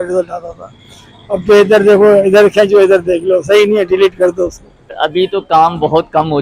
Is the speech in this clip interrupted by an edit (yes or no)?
yes